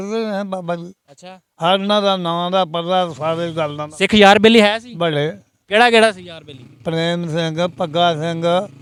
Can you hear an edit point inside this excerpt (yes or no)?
no